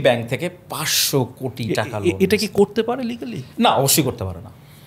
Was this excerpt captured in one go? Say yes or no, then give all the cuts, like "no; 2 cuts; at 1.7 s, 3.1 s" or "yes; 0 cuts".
yes; 0 cuts